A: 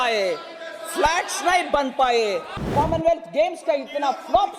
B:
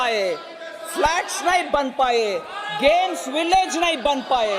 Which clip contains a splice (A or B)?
A